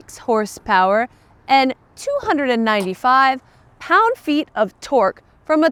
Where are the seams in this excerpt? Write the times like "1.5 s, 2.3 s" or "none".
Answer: none

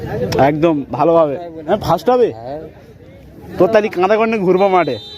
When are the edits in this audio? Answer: 1.5 s

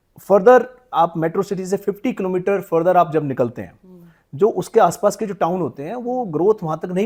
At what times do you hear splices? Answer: none

